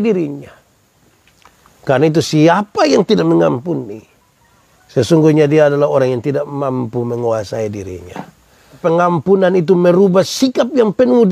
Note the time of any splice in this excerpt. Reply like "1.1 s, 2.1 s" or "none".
8.8 s